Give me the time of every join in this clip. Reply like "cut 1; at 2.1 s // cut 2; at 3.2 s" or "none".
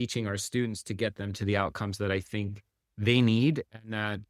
cut 1; at 1.4 s